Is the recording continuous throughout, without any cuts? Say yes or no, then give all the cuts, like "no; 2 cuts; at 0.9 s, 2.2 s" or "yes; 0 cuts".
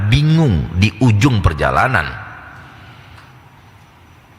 yes; 0 cuts